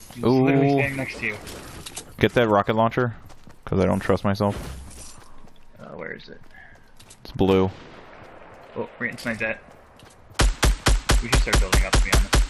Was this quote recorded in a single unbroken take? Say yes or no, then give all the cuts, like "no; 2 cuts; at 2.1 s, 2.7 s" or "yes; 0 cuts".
yes; 0 cuts